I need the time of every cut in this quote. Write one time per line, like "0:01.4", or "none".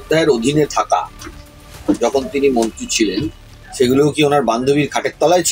0:03.4